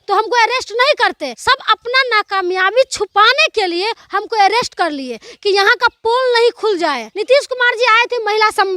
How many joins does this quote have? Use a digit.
2